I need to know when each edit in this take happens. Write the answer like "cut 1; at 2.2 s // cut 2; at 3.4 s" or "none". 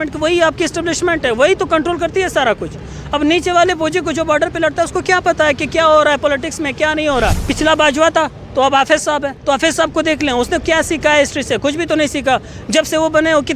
cut 1; at 7.4 s // cut 2; at 9.3 s